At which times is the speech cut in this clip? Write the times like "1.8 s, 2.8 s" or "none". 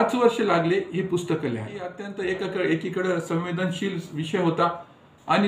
2.0 s